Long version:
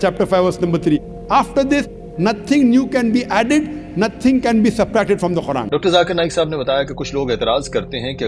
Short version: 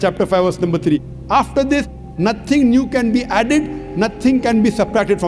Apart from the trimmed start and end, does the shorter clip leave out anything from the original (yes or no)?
no